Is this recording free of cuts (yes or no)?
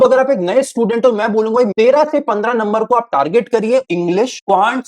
no